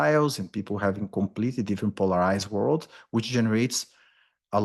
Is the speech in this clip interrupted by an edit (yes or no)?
no